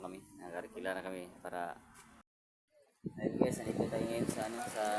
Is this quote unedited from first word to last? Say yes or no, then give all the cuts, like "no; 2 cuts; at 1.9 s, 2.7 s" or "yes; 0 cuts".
no; 1 cut; at 2.3 s